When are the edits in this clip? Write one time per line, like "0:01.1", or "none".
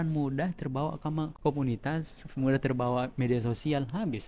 0:01.3